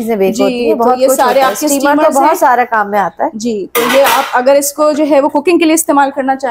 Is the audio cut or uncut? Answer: uncut